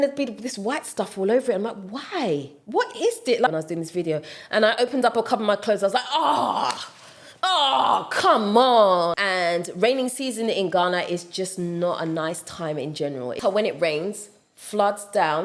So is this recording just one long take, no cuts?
no; 3 cuts; at 3.5 s, 9.2 s, 13.4 s

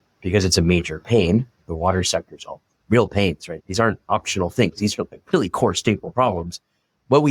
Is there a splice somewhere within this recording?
yes; 1 cut; at 3.5 s

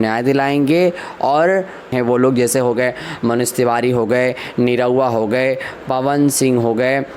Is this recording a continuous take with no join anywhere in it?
no; 1 cut; at 1.9 s

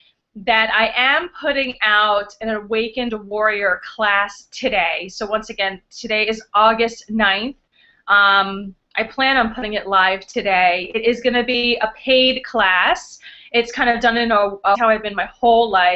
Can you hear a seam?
no; 0 cuts

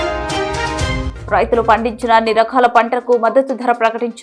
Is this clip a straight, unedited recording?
no; 1 cut; at 1.1 s

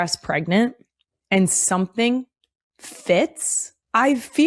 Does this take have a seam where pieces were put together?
no; 0 cuts

